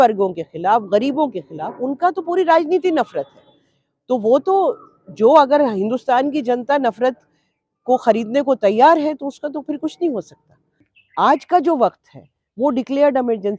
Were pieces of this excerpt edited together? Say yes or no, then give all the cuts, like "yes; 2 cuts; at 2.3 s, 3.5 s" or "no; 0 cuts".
yes; 1 cut; at 10.9 s